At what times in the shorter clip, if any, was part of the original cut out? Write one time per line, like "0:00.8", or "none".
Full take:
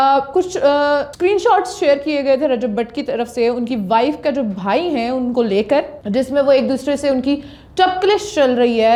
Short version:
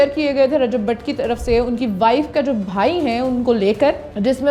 none